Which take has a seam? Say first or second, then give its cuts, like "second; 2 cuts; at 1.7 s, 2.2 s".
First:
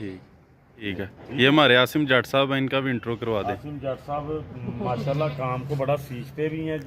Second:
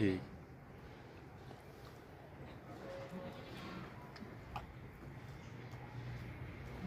first; 1 cut; at 0.9 s